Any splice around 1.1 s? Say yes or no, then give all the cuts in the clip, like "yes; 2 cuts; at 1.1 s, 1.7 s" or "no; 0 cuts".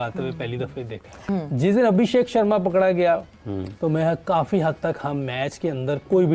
yes; 1 cut; at 1.1 s